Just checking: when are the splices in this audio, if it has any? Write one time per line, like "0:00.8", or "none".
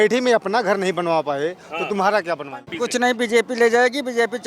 0:02.7